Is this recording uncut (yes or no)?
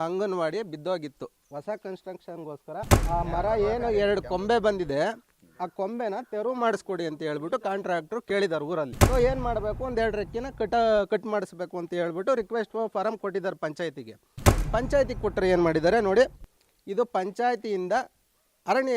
no